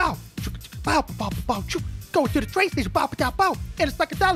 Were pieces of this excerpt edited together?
no; 0 cuts

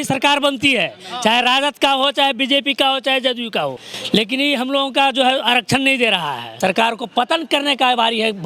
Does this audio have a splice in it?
yes; 2 cuts; at 3.9 s, 6.5 s

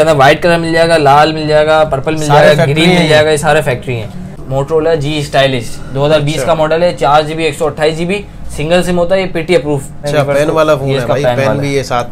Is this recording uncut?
no; 2 cuts; at 4.4 s, 10.0 s

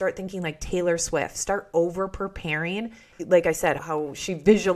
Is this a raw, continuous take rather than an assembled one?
no; 1 cut; at 3.1 s

